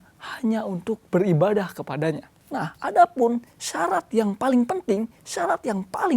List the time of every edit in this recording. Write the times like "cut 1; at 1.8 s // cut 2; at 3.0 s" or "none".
cut 1; at 2.3 s